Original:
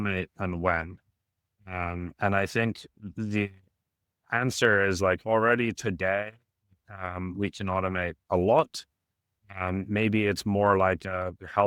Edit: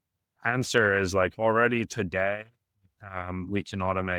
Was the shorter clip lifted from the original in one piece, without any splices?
yes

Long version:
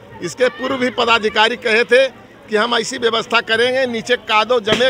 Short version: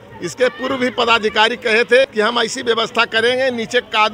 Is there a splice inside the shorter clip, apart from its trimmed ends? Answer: yes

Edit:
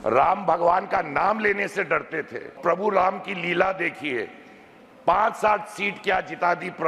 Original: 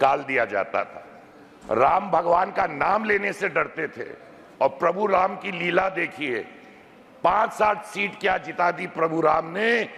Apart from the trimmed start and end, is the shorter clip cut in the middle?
yes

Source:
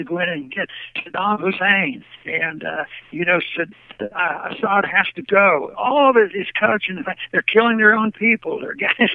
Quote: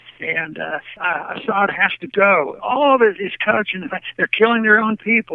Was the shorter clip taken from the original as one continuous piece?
no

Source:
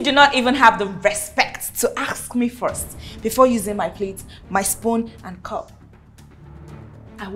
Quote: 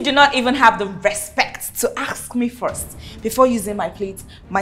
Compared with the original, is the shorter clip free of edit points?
yes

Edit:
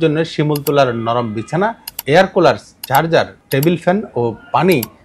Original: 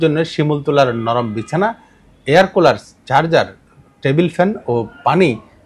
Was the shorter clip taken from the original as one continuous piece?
no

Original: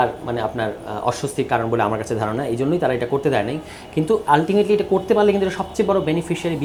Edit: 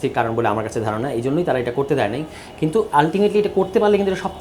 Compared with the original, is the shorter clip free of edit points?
yes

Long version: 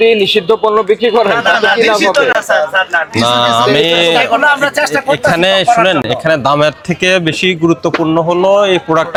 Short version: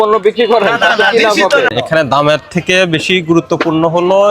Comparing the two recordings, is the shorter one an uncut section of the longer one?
no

